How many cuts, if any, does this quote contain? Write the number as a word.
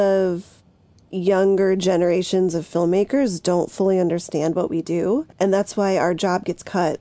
one